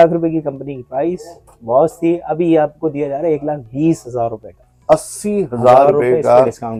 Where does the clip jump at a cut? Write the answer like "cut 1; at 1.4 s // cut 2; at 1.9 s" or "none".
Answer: none